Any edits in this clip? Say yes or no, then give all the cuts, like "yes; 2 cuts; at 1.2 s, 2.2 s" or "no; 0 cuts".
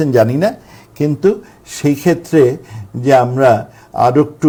no; 0 cuts